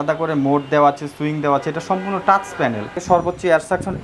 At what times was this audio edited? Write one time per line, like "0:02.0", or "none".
0:03.0